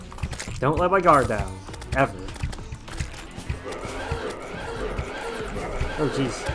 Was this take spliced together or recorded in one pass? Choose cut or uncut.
cut